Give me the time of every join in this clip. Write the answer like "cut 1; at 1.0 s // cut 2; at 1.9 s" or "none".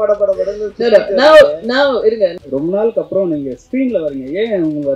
cut 1; at 2.3 s